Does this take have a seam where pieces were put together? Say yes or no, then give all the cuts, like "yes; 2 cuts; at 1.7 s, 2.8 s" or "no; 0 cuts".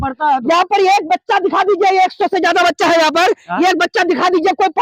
no; 0 cuts